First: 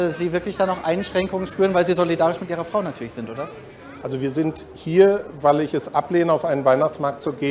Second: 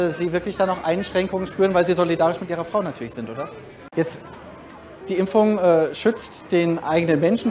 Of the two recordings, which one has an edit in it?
second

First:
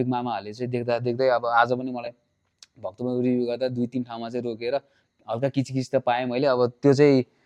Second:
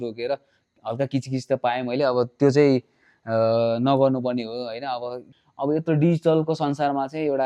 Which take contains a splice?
second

